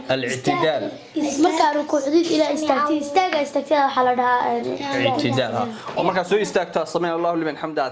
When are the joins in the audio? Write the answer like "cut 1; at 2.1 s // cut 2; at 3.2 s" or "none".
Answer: none